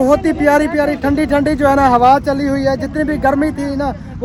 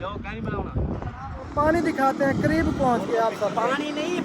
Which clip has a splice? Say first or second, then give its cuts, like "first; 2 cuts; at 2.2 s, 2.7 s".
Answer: second; 1 cut; at 1.5 s